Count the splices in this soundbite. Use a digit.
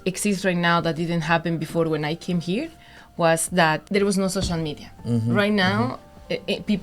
1